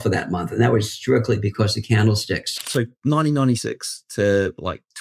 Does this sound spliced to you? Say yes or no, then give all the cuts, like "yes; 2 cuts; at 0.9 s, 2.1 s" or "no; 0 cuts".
yes; 2 cuts; at 1.5 s, 2.5 s